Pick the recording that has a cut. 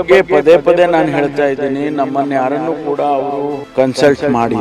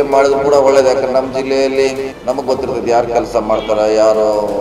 first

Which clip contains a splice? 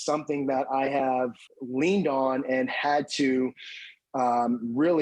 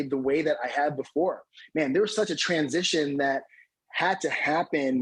first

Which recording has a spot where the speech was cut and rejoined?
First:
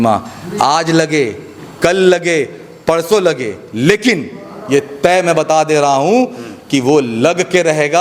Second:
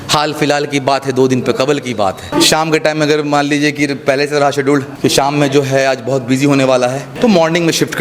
second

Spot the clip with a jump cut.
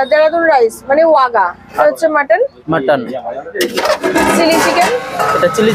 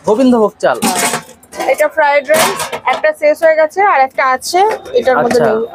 first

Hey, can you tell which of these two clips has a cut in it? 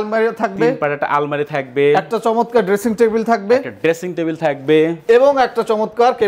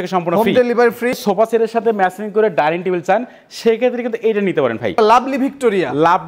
second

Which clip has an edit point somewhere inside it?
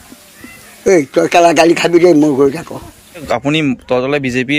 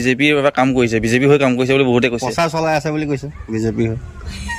first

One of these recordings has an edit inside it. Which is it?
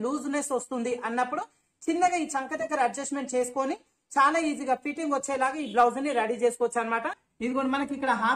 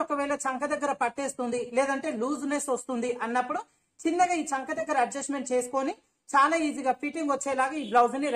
first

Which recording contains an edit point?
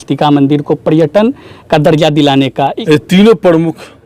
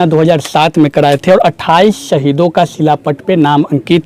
first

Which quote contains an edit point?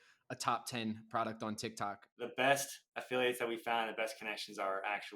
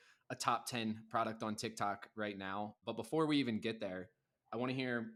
first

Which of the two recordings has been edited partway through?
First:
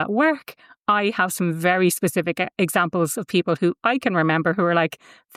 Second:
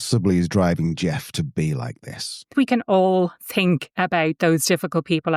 second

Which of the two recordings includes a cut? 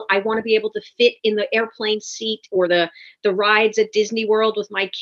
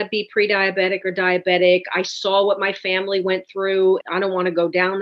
second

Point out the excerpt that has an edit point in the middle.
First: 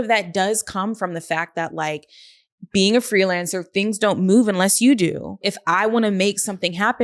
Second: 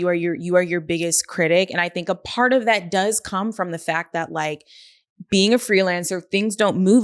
first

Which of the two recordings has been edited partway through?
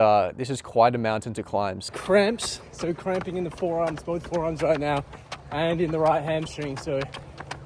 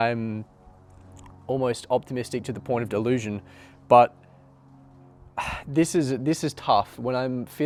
first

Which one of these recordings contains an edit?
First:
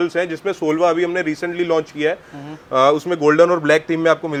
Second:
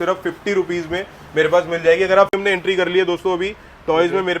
second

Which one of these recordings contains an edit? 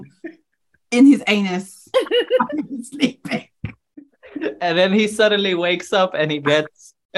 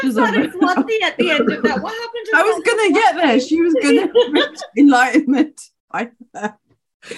first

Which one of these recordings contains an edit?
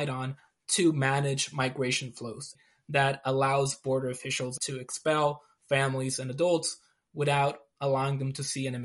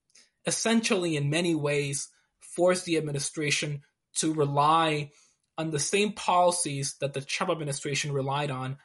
first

